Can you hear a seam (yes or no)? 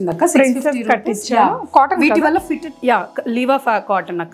no